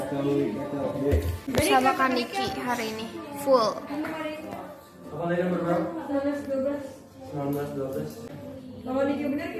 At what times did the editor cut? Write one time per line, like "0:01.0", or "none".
0:01.5
0:08.2